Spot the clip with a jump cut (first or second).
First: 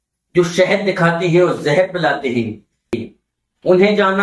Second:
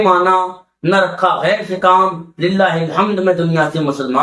first